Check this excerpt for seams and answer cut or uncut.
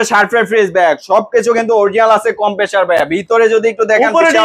uncut